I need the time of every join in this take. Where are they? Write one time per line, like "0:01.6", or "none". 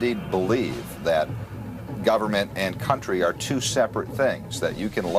0:02.9